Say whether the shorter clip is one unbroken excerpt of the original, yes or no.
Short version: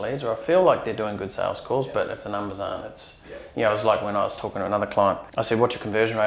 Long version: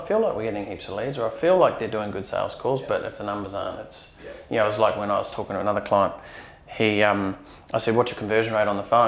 no